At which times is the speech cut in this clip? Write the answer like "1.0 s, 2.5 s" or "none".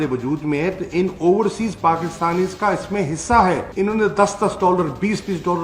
none